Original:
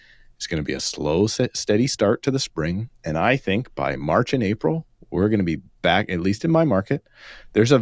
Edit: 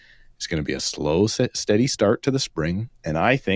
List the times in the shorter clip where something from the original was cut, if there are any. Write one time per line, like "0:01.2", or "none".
none